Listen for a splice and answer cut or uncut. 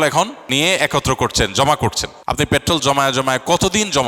cut